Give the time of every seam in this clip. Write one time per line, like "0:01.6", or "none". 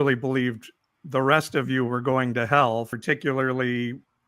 0:02.9